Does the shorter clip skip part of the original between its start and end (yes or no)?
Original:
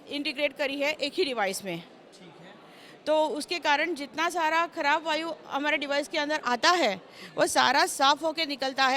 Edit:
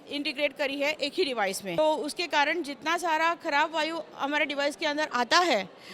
yes